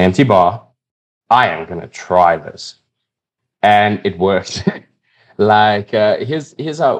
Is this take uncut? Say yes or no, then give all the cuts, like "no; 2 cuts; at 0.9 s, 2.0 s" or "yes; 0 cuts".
yes; 0 cuts